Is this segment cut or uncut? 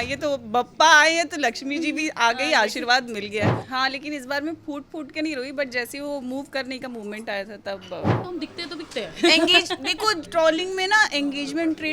cut